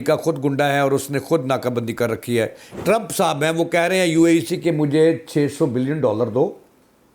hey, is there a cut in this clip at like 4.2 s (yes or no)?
no